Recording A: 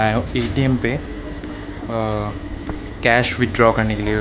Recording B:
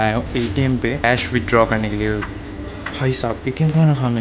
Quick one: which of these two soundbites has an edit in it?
B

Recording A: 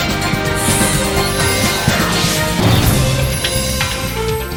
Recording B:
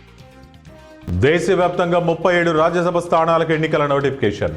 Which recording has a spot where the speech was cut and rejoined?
B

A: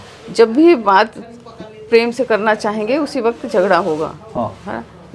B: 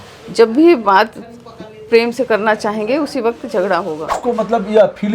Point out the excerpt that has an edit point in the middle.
B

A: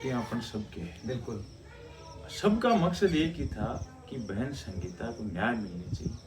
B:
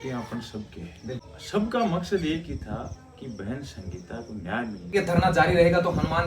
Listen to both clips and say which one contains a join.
B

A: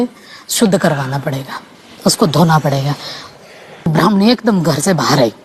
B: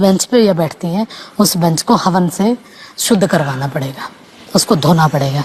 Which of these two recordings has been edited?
A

